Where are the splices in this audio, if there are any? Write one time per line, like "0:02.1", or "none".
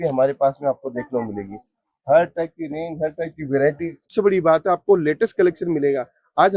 0:04.0